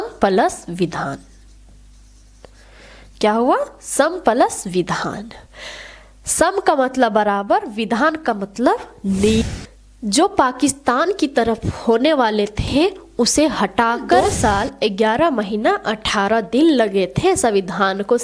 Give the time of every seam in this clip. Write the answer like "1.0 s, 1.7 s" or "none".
9.4 s, 14.3 s